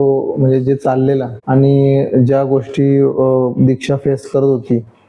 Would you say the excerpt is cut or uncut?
cut